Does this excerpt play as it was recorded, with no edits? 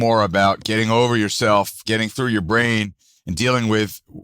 no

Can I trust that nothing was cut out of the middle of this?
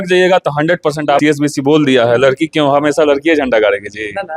no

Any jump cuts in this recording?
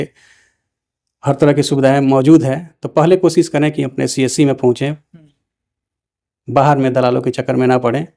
no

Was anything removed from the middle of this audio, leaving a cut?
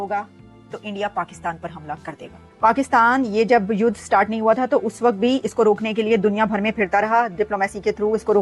no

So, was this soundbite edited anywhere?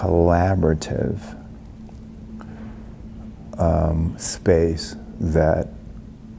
no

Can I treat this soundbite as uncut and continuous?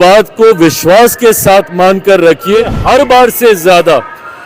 no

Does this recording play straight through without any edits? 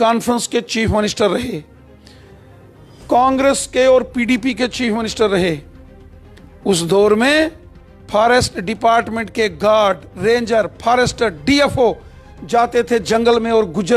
yes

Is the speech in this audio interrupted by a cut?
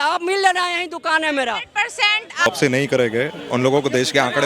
yes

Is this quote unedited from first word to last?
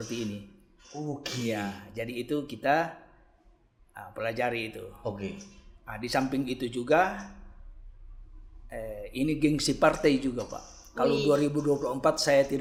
yes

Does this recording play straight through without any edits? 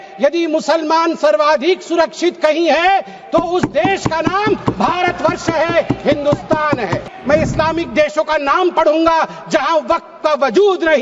no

